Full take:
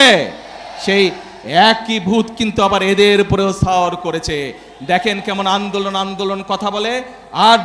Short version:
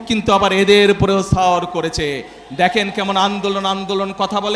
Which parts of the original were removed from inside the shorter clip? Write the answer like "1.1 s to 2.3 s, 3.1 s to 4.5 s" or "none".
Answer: none